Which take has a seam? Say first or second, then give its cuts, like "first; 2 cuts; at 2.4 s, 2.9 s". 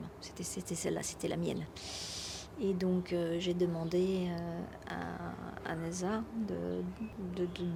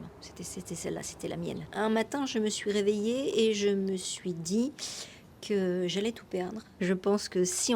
second; 2 cuts; at 1.6 s, 6.6 s